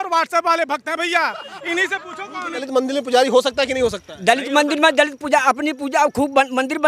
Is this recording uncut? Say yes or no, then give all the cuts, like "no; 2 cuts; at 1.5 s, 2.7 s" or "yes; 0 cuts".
no; 1 cut; at 2.6 s